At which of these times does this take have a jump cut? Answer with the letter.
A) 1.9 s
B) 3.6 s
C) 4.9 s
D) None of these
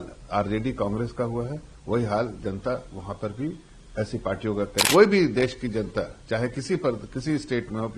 C